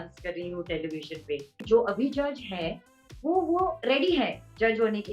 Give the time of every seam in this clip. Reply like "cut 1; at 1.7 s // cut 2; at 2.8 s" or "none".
cut 1; at 1.6 s